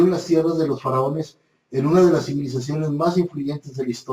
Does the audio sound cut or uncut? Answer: cut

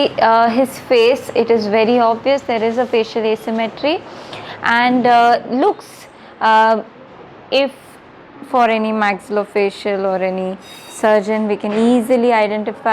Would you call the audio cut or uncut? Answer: uncut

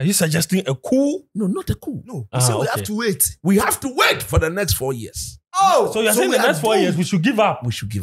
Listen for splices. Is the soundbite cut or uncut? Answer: uncut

